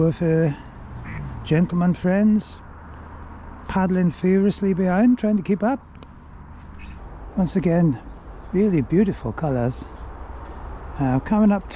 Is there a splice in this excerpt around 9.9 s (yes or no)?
no